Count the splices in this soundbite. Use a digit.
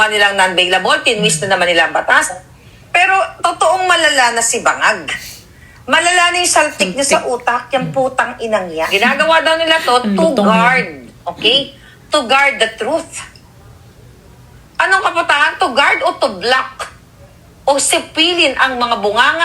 2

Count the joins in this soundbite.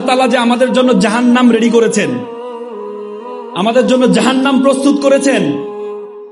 0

